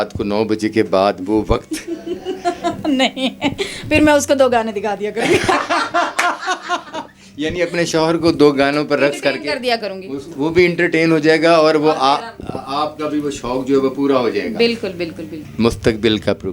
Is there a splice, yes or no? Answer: no